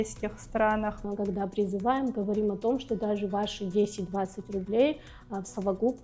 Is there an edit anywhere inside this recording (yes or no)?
yes